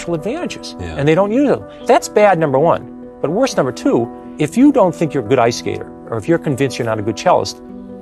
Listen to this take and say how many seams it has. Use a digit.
2